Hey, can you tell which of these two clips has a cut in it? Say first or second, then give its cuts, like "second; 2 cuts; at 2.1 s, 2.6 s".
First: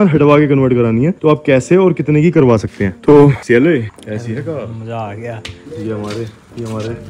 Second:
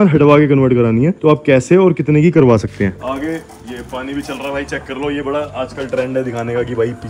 second; 1 cut; at 3.0 s